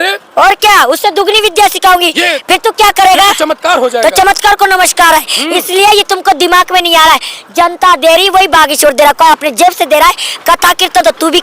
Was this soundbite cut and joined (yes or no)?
no